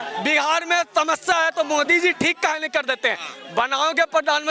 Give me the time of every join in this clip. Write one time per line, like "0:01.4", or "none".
none